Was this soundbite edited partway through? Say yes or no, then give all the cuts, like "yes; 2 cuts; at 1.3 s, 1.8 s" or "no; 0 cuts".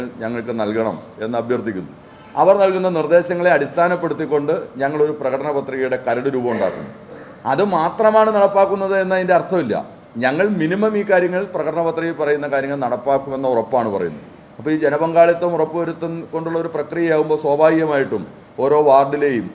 no; 0 cuts